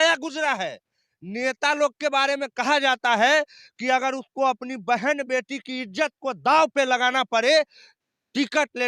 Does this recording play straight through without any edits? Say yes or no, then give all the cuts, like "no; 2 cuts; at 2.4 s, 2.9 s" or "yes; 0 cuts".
yes; 0 cuts